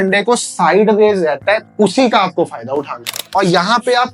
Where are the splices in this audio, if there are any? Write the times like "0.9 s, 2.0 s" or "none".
1.7 s, 3.2 s

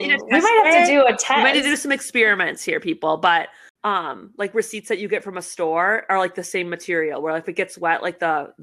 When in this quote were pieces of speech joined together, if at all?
3.6 s

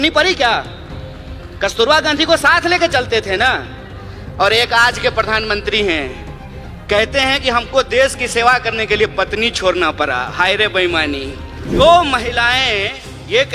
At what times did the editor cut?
11.8 s

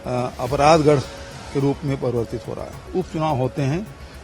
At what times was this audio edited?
2.9 s

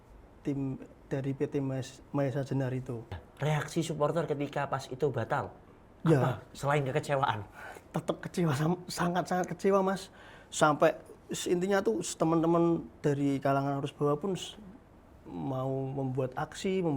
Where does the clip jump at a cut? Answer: 3.2 s

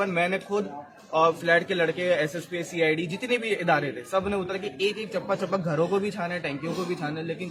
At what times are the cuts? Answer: none

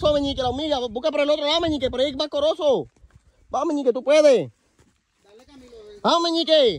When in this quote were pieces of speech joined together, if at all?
none

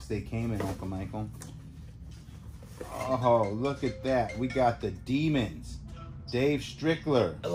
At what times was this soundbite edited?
none

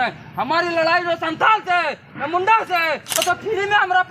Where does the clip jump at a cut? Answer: 3.2 s

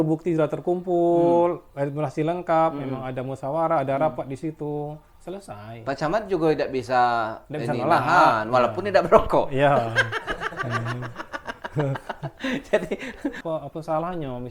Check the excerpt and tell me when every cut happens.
13.4 s

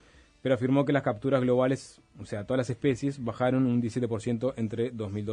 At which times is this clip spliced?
1.6 s

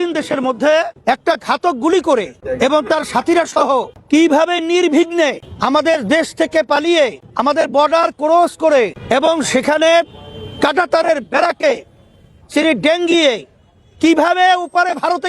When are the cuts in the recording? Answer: 0.9 s, 2.4 s, 3.9 s, 5.5 s, 7.2 s, 9.0 s

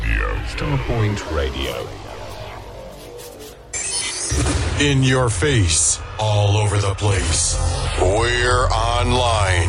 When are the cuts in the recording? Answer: none

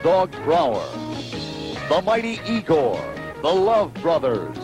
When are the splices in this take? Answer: 3.3 s

